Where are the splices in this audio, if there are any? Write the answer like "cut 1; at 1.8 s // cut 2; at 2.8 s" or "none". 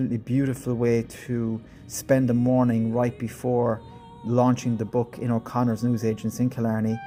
none